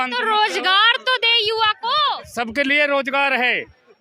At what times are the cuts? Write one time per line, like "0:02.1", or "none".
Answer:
0:02.2

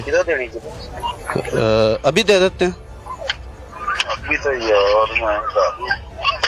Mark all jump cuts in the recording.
none

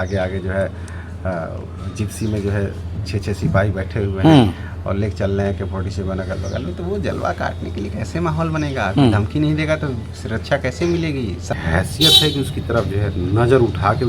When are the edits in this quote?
0:11.5

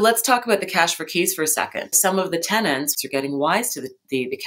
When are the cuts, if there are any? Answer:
0:02.0
0:03.0

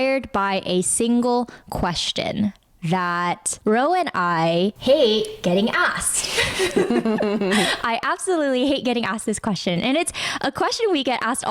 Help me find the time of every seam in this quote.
none

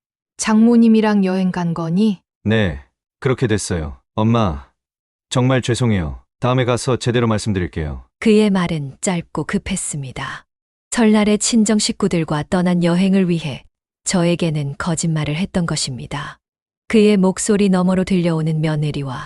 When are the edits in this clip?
0:02.3

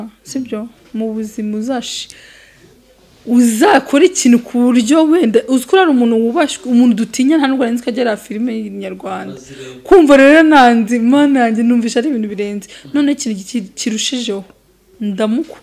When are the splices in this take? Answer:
none

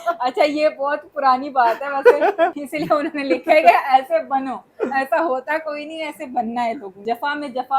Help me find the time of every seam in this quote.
0:02.6
0:07.0

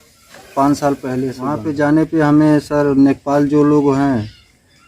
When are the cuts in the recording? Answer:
0:01.6

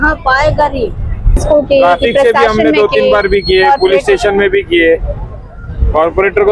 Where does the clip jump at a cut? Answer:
0:01.4

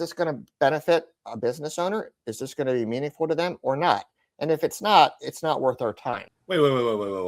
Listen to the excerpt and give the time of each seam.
0:06.3

